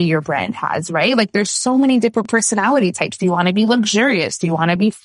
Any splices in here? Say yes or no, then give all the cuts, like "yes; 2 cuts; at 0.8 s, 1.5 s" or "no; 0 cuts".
no; 0 cuts